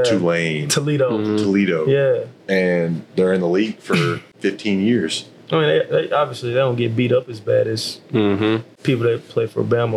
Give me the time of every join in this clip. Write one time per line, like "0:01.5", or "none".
0:04.3
0:08.7